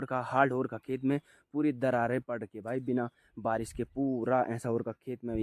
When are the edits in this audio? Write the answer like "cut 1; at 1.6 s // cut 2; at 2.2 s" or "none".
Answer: none